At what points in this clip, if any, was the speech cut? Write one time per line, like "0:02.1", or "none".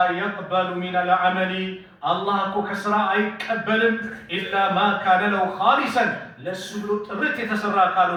none